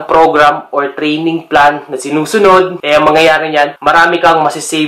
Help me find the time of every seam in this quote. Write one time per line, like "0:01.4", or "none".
0:02.8
0:03.8